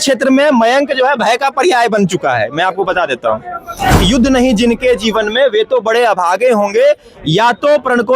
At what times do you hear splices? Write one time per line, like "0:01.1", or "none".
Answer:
0:04.0